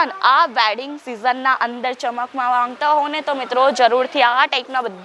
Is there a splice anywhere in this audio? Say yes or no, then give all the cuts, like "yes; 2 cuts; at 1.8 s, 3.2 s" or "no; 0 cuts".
no; 0 cuts